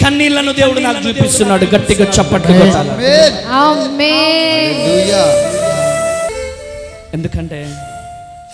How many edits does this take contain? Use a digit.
1